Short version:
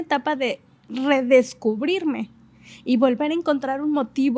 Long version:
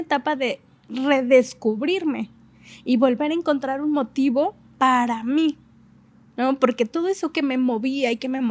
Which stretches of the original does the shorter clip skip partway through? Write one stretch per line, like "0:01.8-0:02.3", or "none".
none